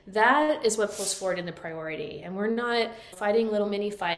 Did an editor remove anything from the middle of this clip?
no; 0 cuts

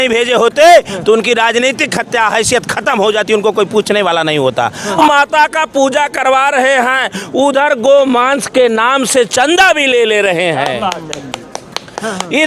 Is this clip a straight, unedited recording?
no; 1 cut; at 4.9 s

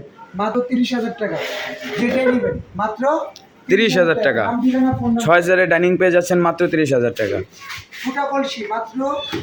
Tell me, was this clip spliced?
no; 0 cuts

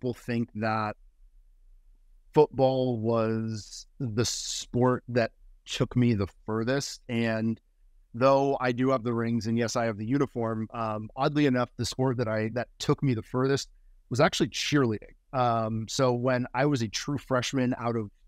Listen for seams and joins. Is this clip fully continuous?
yes; 0 cuts

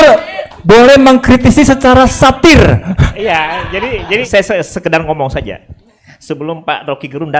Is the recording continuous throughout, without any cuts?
no; 1 cut; at 4.3 s

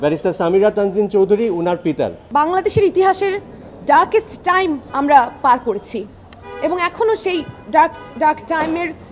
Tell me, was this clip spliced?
yes; 1 cut; at 2.2 s

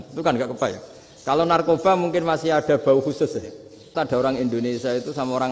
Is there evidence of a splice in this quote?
yes; 1 cut; at 3.9 s

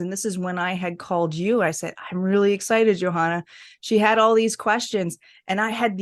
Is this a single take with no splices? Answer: yes; 0 cuts

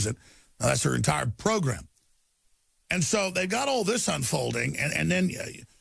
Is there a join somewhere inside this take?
yes; 1 cut; at 3.5 s

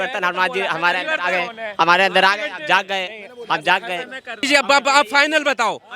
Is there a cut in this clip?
yes; 1 cut; at 4.4 s

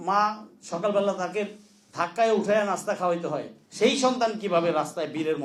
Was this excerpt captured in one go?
yes; 0 cuts

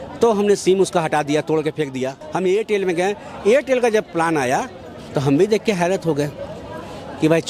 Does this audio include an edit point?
yes; 1 cut; at 2.2 s

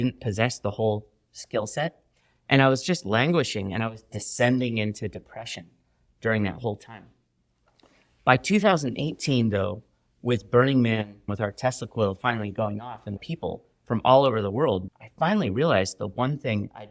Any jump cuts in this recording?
yes; 3 cuts; at 11.3 s, 13.2 s, 14.9 s

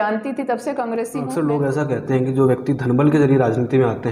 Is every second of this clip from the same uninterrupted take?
no; 1 cut; at 1.3 s

